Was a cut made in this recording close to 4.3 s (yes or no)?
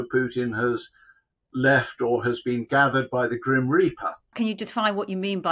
yes